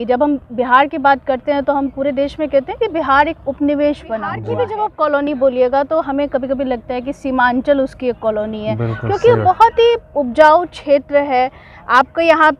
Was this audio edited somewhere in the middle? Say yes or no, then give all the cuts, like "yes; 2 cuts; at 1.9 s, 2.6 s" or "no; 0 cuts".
yes; 1 cut; at 4.5 s